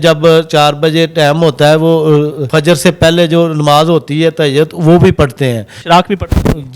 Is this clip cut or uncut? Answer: cut